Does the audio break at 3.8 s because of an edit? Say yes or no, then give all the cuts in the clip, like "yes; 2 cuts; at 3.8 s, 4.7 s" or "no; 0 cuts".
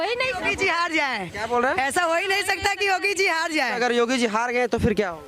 yes; 1 cut; at 3.8 s